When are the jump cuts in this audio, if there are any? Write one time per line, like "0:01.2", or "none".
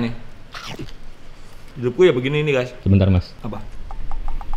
0:02.7
0:03.3